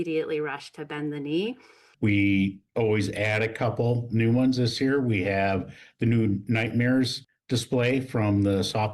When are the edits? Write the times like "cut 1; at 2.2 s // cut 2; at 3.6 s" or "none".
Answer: cut 1; at 1.8 s